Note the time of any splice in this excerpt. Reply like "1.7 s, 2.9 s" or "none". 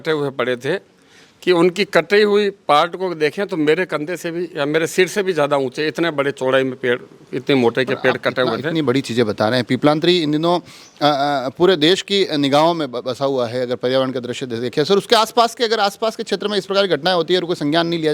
none